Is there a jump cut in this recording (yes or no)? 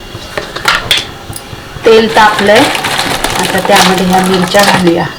no